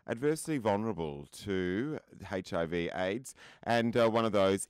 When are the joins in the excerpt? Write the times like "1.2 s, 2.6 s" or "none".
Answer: none